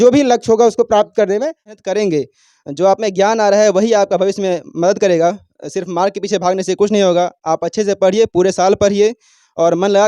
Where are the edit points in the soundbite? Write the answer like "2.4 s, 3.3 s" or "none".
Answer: 1.8 s